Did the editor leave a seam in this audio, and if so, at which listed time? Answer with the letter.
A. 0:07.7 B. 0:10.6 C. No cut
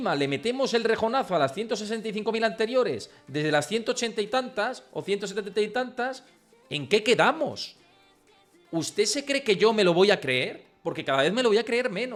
C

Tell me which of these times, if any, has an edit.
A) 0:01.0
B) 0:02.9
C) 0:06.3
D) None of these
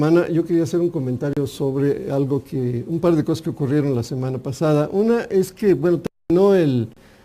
B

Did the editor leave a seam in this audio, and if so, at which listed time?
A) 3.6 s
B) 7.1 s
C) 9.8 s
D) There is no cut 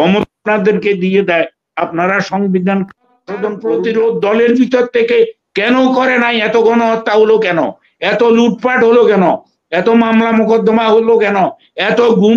A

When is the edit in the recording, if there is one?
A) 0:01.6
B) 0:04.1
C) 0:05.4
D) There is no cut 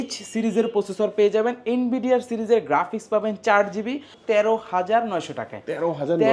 B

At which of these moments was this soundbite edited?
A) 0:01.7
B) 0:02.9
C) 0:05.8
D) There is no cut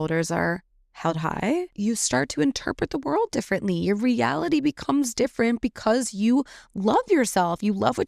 A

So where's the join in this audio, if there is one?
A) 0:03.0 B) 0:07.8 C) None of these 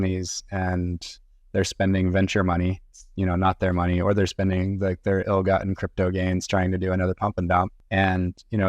B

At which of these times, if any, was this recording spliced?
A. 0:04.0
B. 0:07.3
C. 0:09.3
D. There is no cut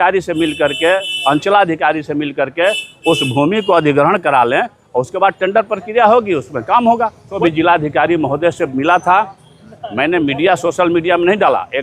B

